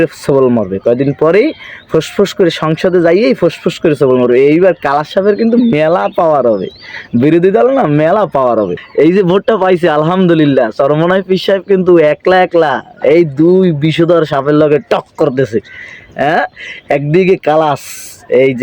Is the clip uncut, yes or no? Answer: no